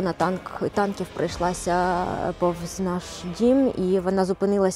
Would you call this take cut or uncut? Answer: uncut